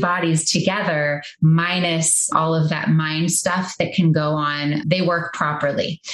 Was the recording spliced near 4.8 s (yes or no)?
yes